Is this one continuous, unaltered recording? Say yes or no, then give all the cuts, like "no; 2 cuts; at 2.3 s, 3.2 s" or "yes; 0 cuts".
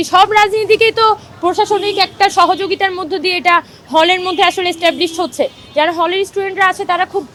yes; 0 cuts